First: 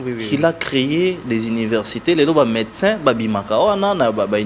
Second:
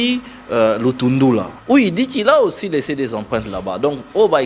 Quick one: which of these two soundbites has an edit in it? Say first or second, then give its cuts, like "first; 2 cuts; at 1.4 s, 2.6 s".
second; 1 cut; at 1.5 s